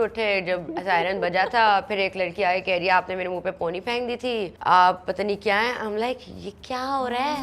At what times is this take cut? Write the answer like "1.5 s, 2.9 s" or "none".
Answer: 4.5 s